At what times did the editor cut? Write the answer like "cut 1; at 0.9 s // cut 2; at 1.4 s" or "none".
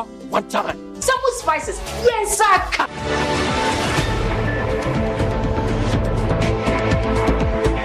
none